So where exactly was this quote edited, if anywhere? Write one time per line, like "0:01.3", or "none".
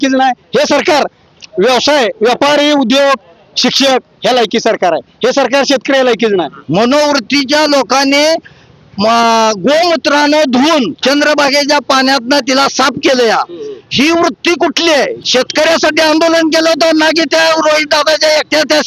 0:06.5
0:15.2